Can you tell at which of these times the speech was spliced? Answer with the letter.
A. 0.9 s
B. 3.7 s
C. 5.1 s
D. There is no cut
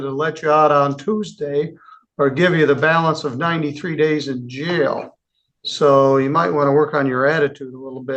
D